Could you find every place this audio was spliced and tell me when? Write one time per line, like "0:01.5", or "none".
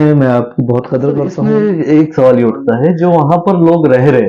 0:01.4